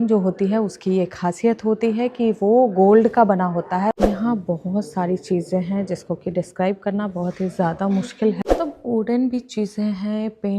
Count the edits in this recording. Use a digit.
2